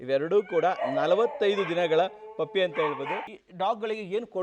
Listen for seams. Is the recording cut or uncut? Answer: cut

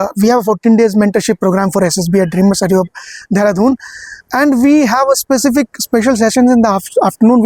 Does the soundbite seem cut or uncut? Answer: uncut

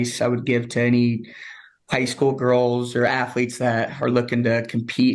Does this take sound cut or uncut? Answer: uncut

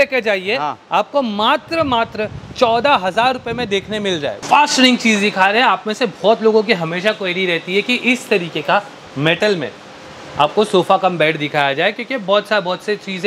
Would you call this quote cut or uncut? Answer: uncut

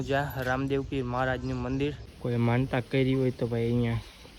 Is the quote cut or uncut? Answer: cut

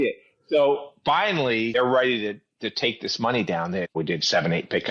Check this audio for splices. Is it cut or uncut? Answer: cut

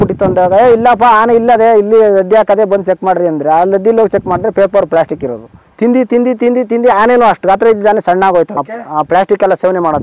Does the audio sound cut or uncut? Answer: cut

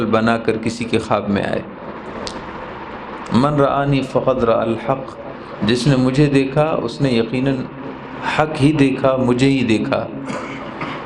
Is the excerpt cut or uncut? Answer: uncut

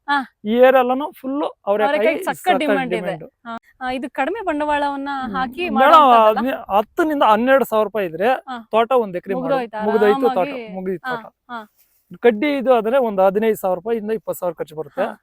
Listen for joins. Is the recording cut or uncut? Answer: cut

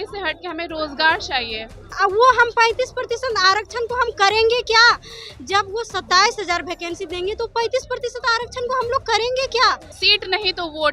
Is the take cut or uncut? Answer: cut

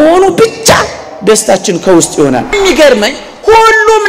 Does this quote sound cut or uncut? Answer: cut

